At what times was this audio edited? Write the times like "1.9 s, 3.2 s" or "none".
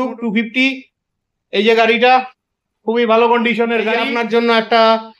4.1 s